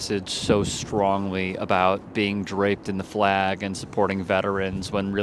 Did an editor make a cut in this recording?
no; 0 cuts

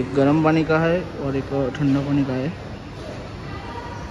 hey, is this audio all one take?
yes; 0 cuts

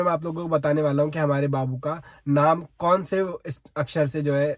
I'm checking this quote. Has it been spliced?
no; 0 cuts

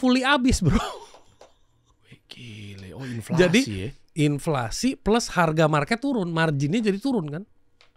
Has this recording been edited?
no; 0 cuts

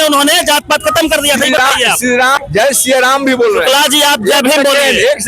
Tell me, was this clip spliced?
yes; 1 cut; at 2.4 s

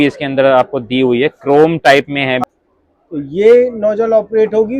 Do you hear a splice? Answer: yes; 1 cut; at 2.4 s

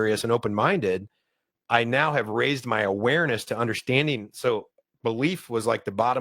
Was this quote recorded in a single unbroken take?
no; 1 cut; at 4.3 s

